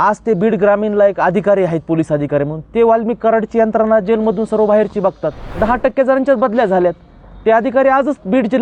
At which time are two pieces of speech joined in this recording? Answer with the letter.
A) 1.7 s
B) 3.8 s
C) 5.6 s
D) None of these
C